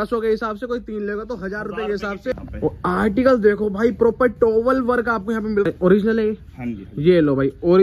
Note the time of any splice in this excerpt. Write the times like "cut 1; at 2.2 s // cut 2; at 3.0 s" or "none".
cut 1; at 2.3 s // cut 2; at 5.6 s